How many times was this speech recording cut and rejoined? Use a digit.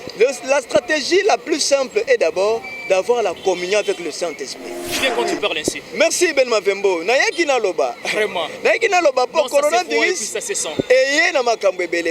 1